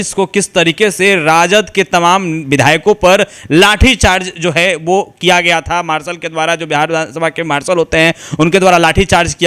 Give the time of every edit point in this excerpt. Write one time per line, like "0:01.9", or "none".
none